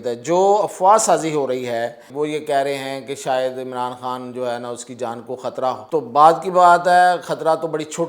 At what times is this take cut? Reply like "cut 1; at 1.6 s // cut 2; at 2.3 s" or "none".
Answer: cut 1; at 2.0 s // cut 2; at 5.8 s